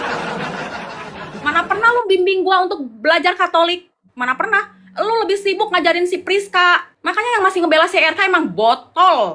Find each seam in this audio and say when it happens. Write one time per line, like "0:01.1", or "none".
0:01.2
0:06.9